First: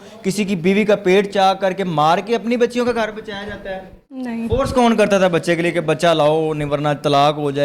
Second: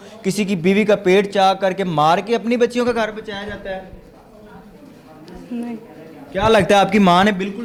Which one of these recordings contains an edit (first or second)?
first